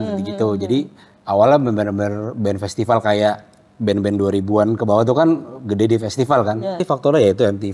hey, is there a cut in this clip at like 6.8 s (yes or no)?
yes